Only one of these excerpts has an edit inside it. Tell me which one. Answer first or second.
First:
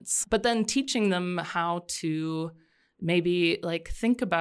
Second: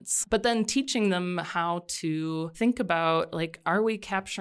second